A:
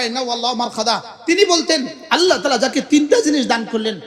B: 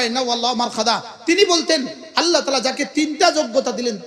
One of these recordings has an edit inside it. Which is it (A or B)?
A